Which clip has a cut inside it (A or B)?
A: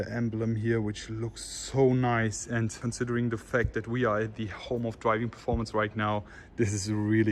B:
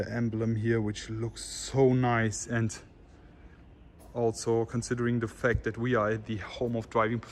A